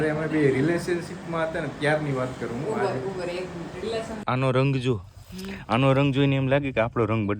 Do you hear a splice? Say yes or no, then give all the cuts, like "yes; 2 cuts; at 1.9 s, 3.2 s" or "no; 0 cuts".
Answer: yes; 1 cut; at 4.2 s